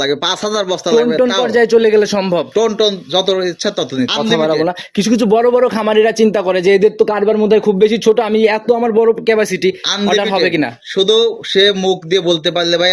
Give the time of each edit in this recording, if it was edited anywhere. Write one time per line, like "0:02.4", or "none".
0:04.1

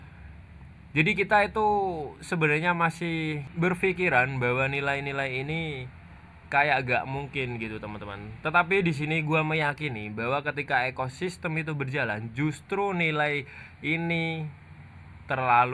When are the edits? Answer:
0:03.5

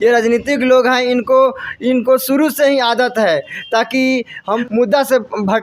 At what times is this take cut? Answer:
0:04.6

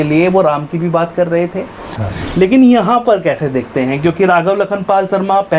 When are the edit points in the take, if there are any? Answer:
0:02.0

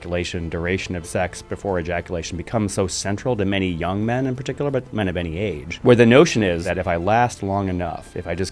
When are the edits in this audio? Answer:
0:01.0
0:05.7
0:06.7

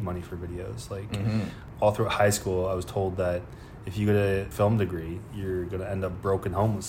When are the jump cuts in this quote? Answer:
0:01.6
0:04.5

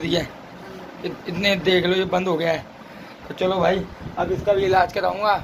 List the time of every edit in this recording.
none

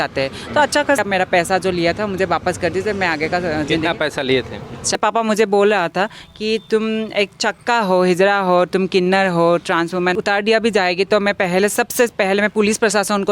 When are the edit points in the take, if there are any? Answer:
0:01.0
0:05.0
0:10.1

